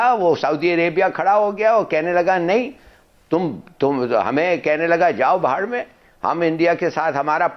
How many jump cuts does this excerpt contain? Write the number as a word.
zero